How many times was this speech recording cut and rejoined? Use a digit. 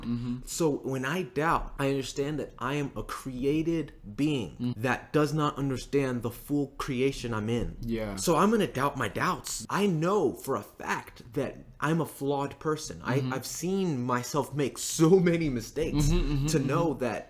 4